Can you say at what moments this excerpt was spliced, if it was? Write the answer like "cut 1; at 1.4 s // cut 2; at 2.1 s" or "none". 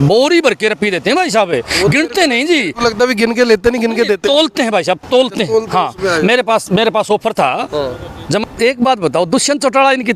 cut 1; at 8.4 s